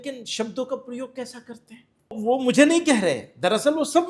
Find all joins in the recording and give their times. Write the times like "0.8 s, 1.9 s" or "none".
2.2 s